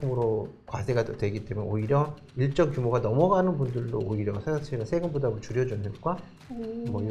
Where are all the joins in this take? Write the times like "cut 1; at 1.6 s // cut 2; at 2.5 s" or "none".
none